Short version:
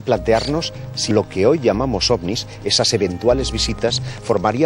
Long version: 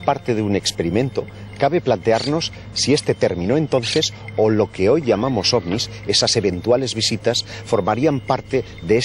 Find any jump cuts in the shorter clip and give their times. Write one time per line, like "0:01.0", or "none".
0:01.1